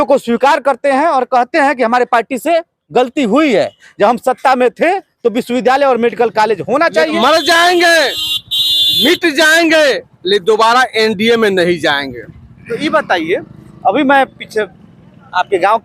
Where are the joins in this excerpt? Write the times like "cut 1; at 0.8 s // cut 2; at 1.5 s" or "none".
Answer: cut 1; at 7.2 s